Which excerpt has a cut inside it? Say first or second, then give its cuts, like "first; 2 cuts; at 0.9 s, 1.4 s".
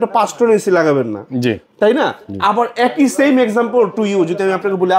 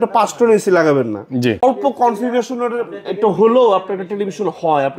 second; 1 cut; at 1.6 s